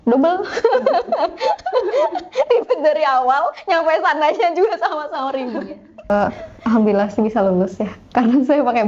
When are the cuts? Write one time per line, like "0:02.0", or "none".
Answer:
0:06.1